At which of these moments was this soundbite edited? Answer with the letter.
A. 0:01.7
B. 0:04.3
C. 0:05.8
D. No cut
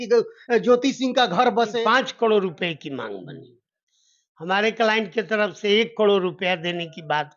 A